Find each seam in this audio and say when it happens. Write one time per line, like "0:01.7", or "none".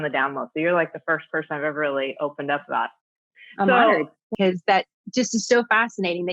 0:04.3